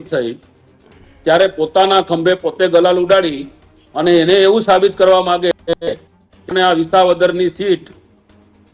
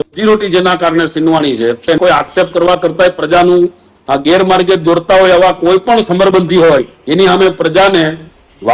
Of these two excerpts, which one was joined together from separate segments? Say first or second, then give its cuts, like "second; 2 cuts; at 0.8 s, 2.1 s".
second; 1 cut; at 1.8 s